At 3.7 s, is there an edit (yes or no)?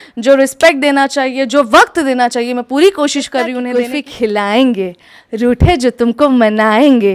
yes